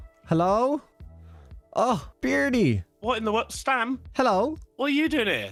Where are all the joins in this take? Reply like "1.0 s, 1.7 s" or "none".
none

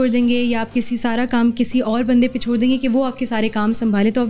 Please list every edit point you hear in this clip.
none

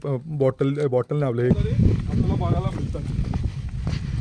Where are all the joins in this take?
1.5 s

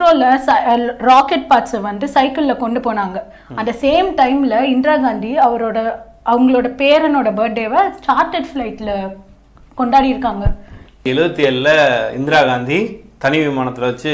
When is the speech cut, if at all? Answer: 11.0 s

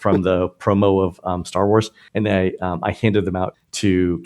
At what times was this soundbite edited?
2.0 s

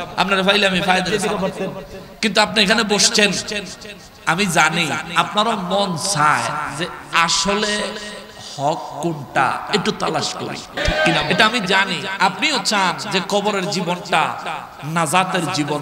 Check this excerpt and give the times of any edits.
1.1 s, 10.8 s

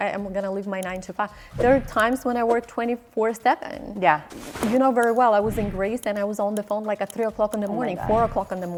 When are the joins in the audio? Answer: none

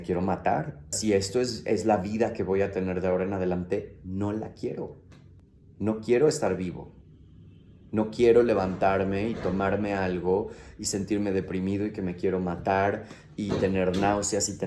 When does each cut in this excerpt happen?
1.0 s

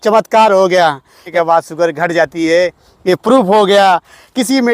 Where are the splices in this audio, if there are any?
1.3 s

